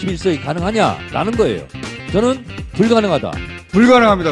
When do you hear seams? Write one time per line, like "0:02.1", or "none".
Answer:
0:02.0